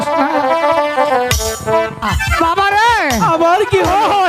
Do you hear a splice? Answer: yes; 1 cut; at 2.2 s

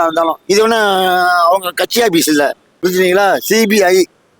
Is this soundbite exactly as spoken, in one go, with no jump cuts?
no; 1 cut; at 2.7 s

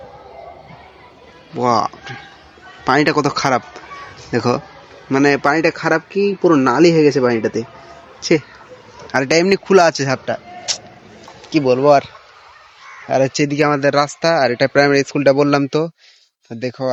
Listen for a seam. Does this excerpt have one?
no; 0 cuts

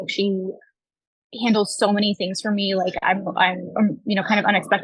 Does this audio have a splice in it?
no; 0 cuts

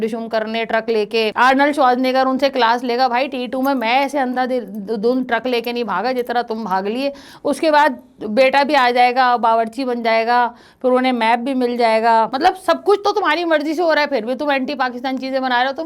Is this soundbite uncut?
yes; 0 cuts

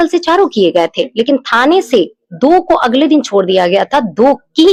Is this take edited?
no; 0 cuts

